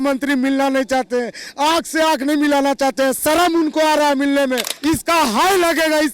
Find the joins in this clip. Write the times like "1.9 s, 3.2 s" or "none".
4.7 s